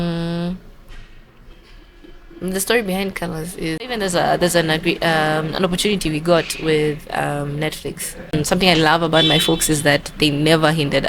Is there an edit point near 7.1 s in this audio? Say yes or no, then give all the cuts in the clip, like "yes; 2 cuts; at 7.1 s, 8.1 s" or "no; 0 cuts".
no; 2 cuts; at 3.9 s, 8.3 s